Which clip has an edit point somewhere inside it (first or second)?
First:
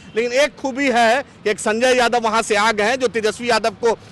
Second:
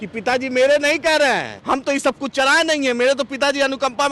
second